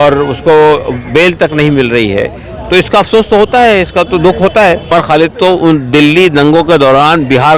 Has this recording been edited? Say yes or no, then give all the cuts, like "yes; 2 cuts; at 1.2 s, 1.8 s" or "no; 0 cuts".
yes; 1 cut; at 4.9 s